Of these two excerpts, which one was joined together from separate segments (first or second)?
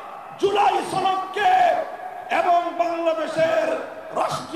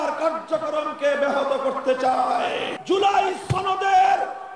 second